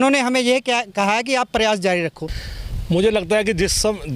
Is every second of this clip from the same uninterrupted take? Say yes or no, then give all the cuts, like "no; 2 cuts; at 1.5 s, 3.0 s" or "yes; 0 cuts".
no; 1 cut; at 2.3 s